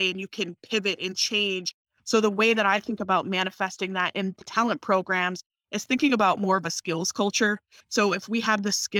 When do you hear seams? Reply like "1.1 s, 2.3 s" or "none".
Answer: 1.8 s, 4.5 s, 7.7 s